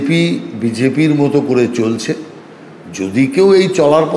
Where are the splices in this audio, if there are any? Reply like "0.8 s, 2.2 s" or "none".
none